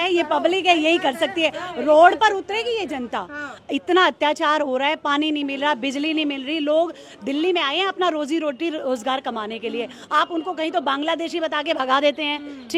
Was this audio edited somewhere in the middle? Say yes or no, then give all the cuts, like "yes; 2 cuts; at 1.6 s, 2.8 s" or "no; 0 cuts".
no; 0 cuts